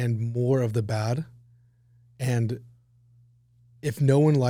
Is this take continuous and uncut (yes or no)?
yes